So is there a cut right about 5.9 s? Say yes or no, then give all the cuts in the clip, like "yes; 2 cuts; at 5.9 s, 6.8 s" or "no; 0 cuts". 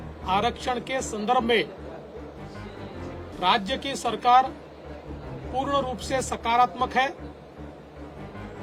no; 0 cuts